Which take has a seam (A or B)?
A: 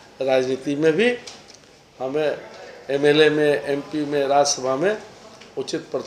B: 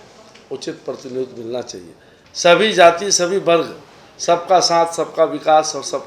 B